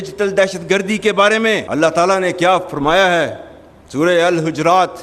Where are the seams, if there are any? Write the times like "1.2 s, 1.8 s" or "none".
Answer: 1.6 s